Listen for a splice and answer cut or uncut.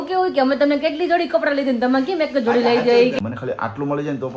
cut